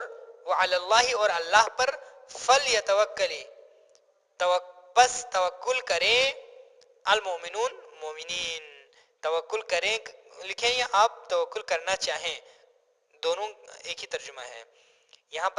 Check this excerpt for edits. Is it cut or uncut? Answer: uncut